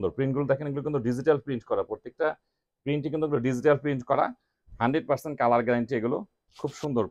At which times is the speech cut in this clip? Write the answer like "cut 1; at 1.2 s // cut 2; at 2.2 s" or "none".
none